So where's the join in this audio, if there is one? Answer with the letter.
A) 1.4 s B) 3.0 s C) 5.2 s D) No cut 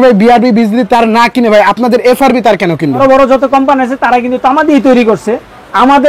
B